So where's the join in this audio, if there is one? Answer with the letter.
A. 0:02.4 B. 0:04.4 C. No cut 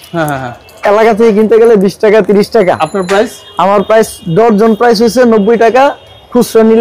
C